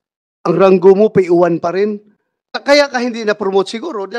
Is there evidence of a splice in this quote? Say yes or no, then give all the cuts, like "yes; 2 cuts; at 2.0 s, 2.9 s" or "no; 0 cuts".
yes; 1 cut; at 2.6 s